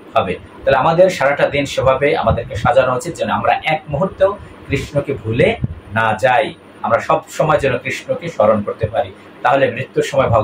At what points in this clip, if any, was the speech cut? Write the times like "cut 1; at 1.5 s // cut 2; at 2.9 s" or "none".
none